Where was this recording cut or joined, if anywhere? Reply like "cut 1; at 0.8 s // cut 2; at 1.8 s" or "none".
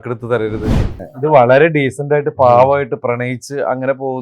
cut 1; at 1.1 s